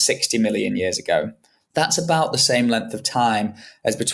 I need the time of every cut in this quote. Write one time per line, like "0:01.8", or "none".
0:01.6